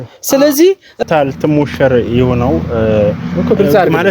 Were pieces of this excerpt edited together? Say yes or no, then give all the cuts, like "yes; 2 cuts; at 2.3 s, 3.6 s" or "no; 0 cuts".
yes; 1 cut; at 1.0 s